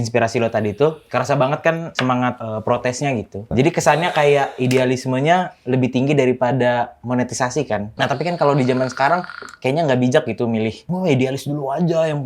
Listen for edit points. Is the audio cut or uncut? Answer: cut